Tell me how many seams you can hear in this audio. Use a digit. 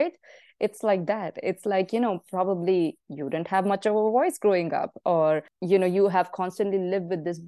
1